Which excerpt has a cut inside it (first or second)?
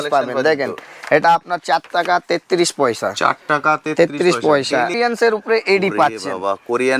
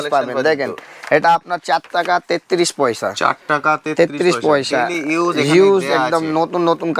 first